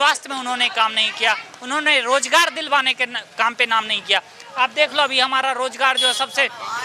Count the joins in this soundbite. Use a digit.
0